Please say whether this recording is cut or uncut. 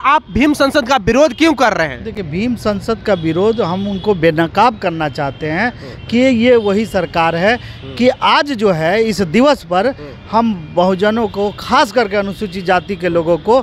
uncut